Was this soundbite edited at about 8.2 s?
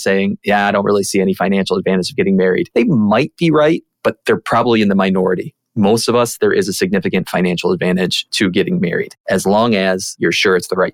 yes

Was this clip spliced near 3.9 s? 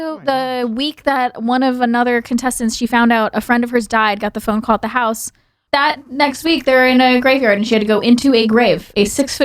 no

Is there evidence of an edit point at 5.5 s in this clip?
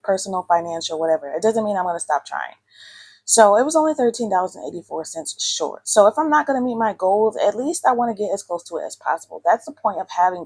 no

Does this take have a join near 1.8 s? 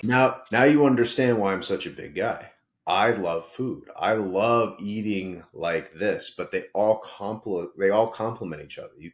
no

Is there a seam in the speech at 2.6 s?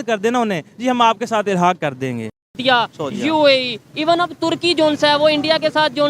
yes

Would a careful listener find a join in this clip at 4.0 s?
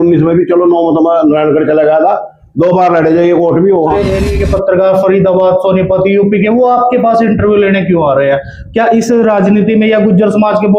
yes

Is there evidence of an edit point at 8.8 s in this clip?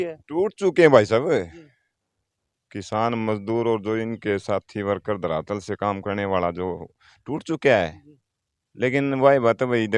no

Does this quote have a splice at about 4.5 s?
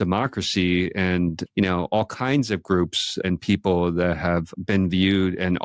yes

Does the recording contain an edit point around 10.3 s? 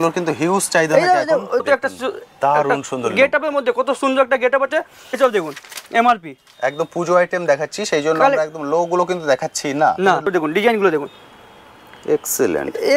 yes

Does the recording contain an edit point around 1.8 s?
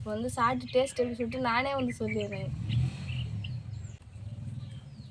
no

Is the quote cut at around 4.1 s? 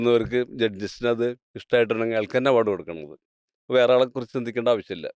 no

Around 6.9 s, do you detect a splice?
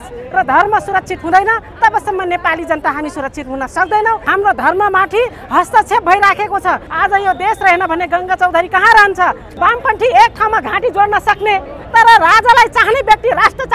yes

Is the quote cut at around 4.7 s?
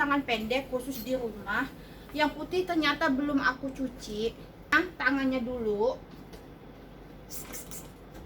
yes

